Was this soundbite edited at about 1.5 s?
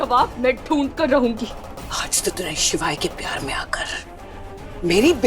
yes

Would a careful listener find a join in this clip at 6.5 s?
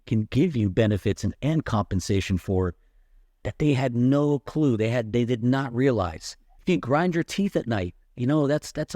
yes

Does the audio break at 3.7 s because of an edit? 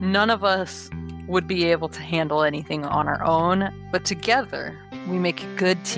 yes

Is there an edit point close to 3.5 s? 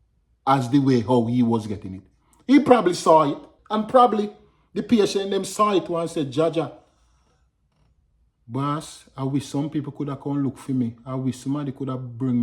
yes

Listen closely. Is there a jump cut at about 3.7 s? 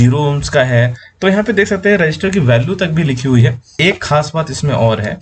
yes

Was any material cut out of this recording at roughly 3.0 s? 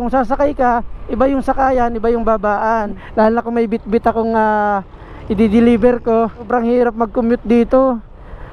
yes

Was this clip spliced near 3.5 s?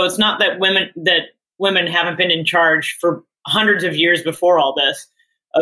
no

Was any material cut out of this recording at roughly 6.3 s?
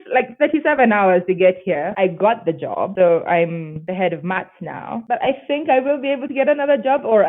no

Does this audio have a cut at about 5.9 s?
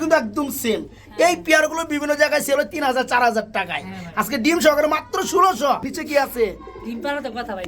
yes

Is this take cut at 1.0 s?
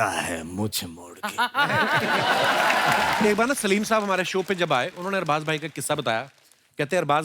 no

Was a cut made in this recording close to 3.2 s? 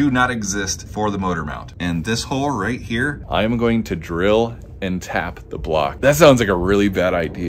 yes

